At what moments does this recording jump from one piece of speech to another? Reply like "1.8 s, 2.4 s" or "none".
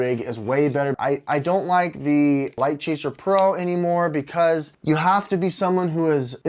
1.0 s, 2.6 s, 4.7 s